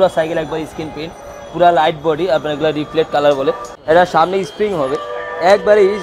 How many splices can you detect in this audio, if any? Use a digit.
1